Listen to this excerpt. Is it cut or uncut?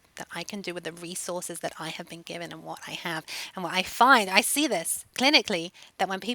cut